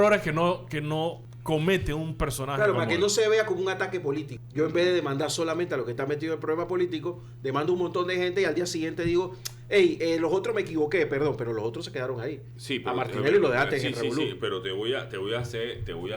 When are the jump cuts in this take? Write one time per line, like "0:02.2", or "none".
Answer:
0:01.3
0:04.4